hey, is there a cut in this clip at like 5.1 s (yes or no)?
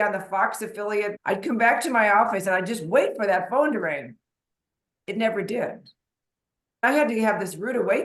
no